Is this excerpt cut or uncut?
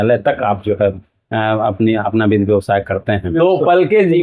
cut